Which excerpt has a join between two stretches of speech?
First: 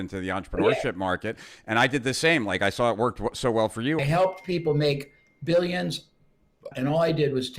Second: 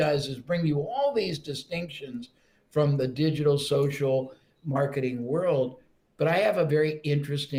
first; 2 cuts; at 4.0 s, 6.7 s

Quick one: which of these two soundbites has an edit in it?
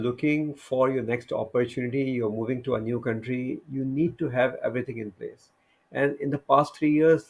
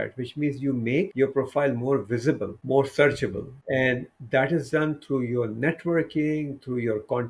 second; 3 cuts; at 1.1 s, 2.5 s, 3.5 s

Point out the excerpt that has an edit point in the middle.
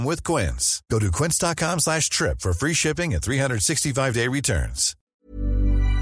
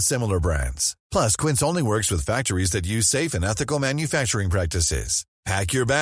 first; 1 cut; at 5.0 s

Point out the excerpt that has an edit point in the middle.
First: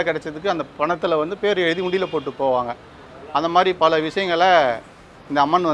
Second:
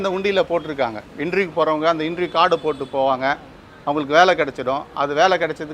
second; 1 cut; at 1.0 s

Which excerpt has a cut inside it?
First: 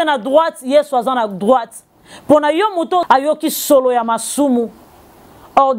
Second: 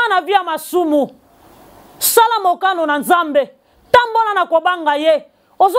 first; 1 cut; at 3.0 s

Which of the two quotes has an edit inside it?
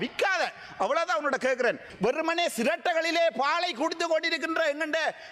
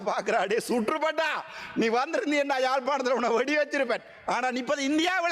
first; 1 cut; at 1.9 s

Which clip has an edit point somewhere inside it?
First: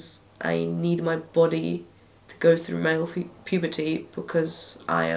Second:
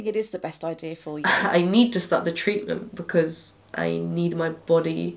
second; 1 cut; at 0.9 s

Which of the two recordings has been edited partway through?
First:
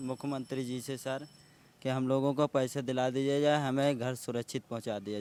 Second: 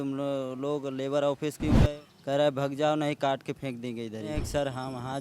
second; 2 cuts; at 1.8 s, 4.4 s

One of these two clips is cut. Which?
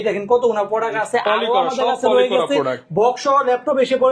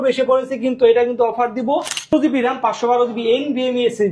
second; 1 cut; at 2.1 s

